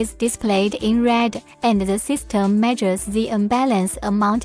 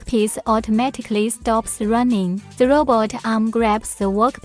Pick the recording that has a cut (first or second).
second